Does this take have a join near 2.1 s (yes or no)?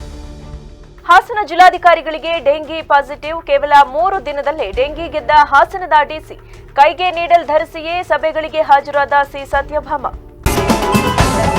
no